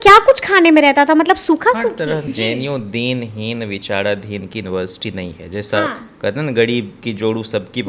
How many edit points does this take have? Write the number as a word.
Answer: one